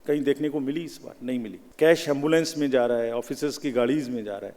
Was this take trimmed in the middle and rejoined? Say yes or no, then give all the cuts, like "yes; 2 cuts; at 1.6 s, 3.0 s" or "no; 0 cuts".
yes; 1 cut; at 1.6 s